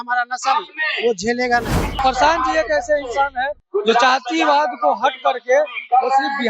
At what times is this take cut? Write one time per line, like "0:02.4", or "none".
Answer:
0:02.0